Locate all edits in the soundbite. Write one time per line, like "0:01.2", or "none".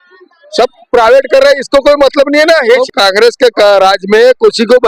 0:02.8